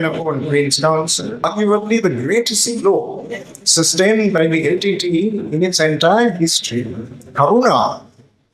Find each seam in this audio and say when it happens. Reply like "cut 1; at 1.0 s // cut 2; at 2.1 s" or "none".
cut 1; at 1.5 s